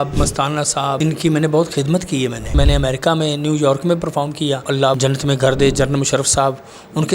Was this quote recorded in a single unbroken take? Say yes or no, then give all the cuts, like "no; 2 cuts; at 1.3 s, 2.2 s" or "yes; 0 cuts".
no; 3 cuts; at 1.0 s, 2.5 s, 4.8 s